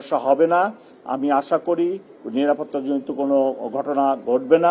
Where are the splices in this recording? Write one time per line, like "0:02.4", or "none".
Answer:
none